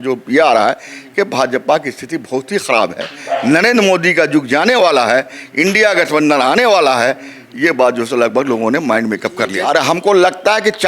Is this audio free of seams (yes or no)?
no